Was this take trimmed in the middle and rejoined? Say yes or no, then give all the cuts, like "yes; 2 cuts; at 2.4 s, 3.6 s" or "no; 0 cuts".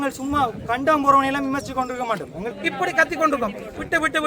yes; 1 cut; at 2.5 s